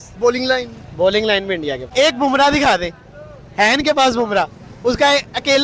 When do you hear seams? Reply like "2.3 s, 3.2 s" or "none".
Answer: 1.8 s